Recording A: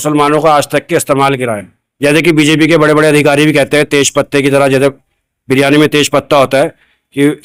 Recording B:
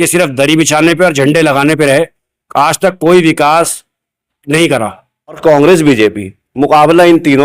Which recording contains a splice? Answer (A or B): B